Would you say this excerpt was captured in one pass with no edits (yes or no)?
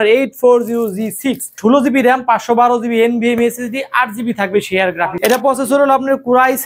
no